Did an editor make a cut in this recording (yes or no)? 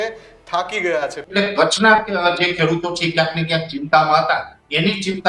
yes